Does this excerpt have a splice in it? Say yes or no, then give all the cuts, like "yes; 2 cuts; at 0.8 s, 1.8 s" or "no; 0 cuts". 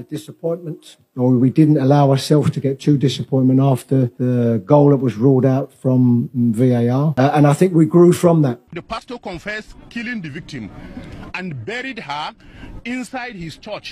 yes; 3 cuts; at 4.1 s, 7.1 s, 8.7 s